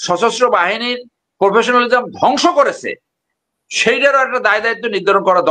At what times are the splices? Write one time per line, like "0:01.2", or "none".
none